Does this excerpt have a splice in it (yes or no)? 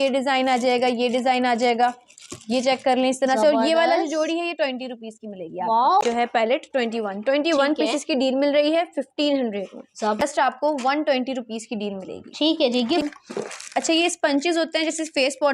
yes